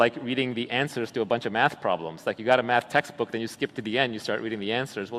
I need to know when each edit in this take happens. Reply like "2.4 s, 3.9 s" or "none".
none